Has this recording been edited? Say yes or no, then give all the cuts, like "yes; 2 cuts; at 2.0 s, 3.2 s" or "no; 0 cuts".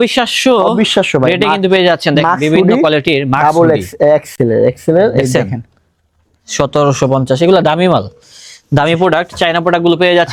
no; 0 cuts